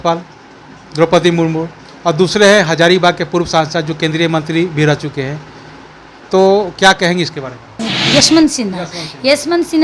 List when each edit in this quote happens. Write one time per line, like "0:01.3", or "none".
0:07.9

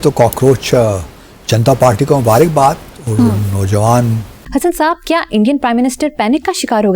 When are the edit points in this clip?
0:04.3

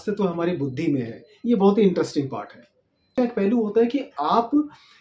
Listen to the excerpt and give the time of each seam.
0:03.2

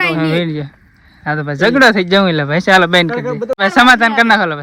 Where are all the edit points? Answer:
0:03.6

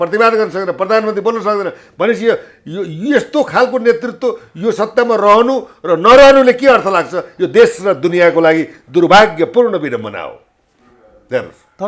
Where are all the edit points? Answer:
none

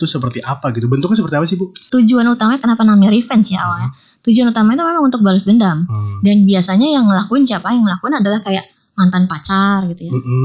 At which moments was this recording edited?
0:01.7

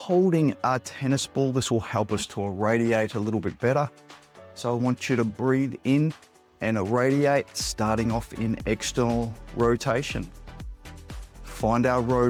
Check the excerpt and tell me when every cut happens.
none

